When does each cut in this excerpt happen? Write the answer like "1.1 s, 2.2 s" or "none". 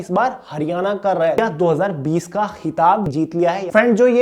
1.4 s, 3.2 s